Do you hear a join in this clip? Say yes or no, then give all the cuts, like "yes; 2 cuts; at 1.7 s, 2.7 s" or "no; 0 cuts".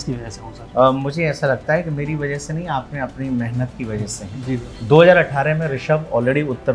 yes; 1 cut; at 4.7 s